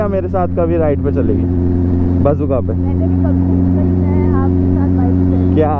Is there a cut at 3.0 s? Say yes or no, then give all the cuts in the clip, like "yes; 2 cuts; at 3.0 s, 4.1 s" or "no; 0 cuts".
no; 0 cuts